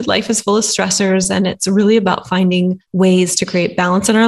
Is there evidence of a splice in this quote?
yes; 1 cut; at 2.8 s

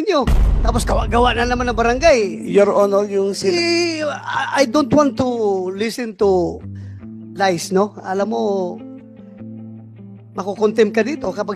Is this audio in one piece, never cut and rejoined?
yes; 0 cuts

